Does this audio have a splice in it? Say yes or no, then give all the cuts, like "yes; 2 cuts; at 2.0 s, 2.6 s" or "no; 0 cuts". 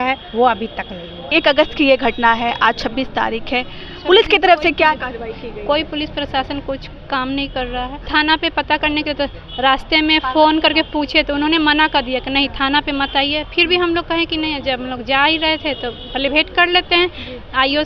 yes; 2 cuts; at 1.3 s, 8.0 s